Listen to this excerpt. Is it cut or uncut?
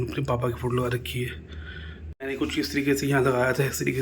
cut